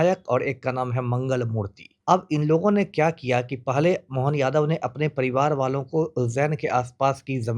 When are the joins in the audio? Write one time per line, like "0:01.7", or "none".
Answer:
0:01.8